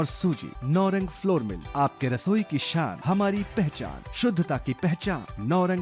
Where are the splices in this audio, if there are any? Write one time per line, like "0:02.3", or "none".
none

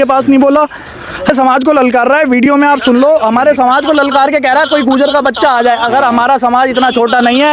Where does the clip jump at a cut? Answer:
0:01.3

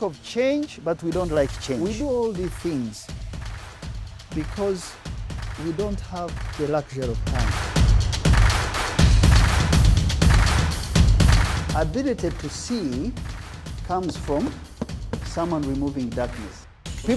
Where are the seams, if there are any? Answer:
none

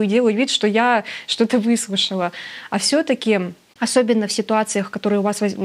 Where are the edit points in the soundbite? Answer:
none

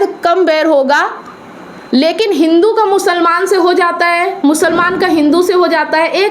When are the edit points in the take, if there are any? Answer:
none

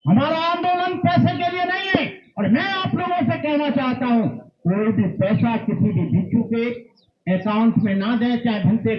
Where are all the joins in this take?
none

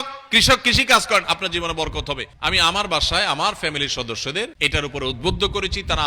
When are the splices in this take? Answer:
0:02.3
0:04.5

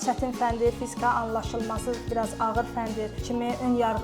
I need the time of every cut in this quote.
0:02.0
0:03.2

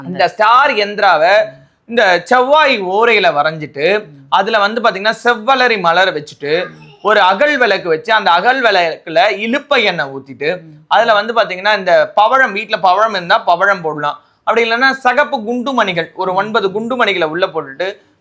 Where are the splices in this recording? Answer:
none

